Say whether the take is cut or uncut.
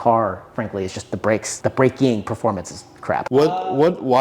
uncut